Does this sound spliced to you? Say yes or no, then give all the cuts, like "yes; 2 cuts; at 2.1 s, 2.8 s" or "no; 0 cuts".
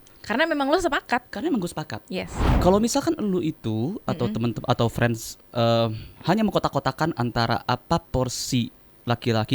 yes; 1 cut; at 2.4 s